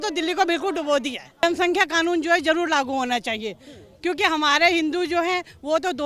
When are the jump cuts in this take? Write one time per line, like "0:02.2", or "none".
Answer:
0:01.2